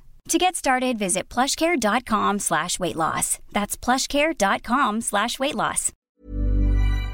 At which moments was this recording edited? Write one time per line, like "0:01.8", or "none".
0:06.1